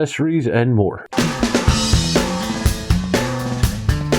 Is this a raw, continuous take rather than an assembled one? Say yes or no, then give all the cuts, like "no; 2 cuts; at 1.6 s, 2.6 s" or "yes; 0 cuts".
no; 1 cut; at 1.0 s